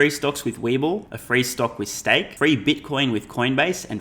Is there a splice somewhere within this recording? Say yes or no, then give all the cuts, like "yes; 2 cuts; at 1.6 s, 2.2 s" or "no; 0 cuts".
yes; 2 cuts; at 1.1 s, 2.3 s